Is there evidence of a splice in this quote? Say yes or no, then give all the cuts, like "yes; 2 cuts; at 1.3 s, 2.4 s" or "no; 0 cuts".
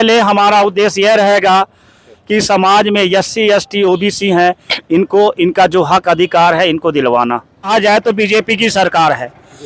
yes; 1 cut; at 7.7 s